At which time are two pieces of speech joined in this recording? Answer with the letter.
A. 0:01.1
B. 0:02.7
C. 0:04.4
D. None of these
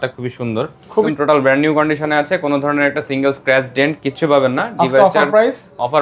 A